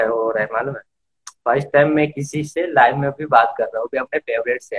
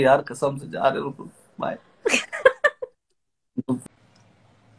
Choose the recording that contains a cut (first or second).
second